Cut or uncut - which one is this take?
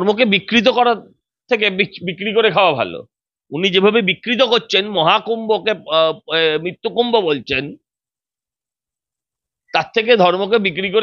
uncut